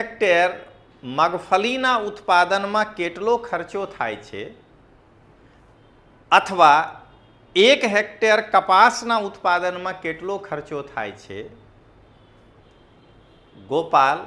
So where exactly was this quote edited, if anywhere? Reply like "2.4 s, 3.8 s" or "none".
none